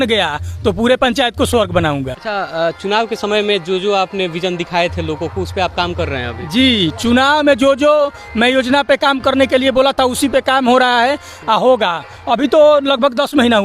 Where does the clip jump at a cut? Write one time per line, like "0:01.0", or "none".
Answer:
0:02.2